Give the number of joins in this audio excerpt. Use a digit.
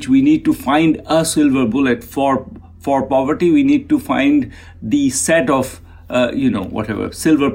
0